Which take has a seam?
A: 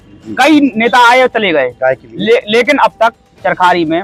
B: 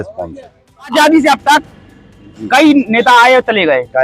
B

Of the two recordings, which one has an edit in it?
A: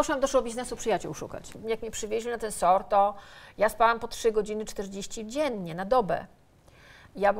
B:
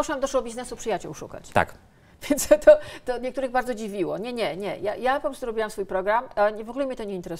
A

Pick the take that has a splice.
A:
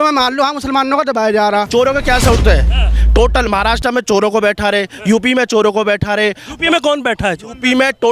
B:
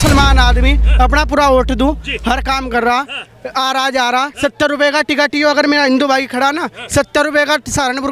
A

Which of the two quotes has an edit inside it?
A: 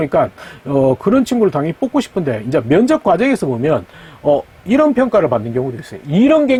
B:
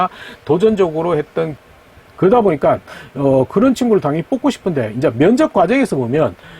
B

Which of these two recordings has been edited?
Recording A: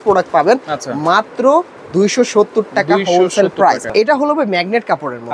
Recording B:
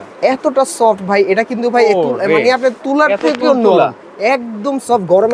A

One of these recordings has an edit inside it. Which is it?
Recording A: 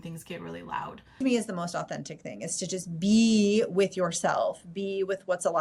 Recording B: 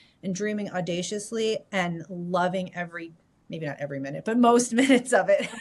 A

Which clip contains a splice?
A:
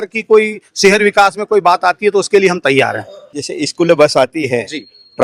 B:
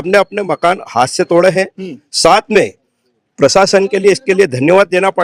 A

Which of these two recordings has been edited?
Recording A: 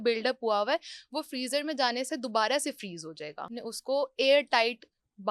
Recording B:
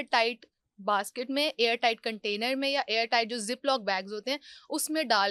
A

